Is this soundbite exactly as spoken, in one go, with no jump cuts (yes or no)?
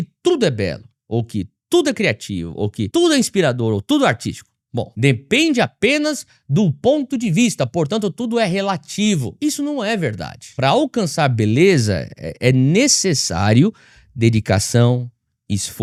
yes